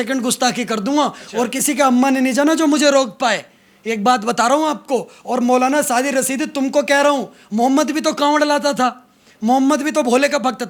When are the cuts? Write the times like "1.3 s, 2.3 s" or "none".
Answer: none